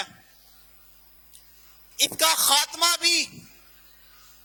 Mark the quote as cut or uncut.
uncut